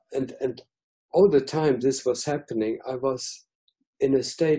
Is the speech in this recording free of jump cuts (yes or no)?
yes